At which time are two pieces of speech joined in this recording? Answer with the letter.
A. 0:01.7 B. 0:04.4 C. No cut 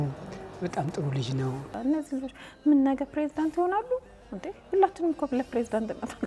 A